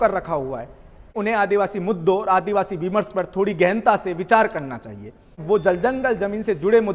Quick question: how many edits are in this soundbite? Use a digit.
2